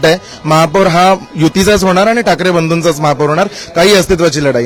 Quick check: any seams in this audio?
no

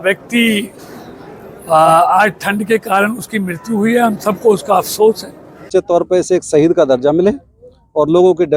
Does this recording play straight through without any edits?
no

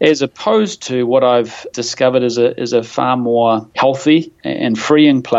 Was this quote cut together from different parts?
yes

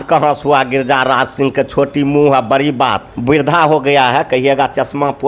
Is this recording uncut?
no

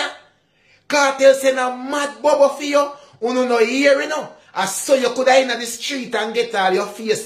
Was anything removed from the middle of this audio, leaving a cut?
no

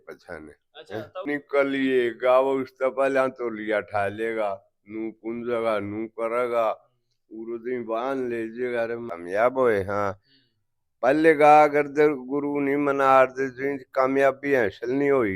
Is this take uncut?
no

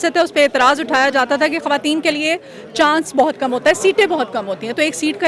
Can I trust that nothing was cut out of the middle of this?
yes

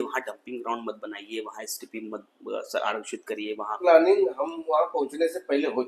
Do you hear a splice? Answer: yes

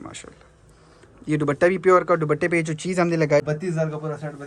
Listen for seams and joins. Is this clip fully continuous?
no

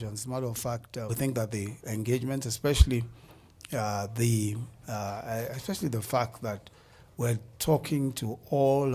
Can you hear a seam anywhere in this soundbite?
no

